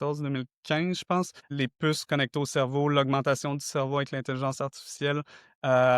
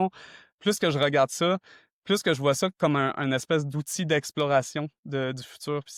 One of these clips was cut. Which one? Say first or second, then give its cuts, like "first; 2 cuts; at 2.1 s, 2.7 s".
first; 1 cut; at 1.4 s